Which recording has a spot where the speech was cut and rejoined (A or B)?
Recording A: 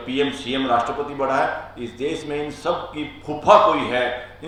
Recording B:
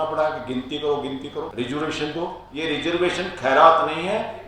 B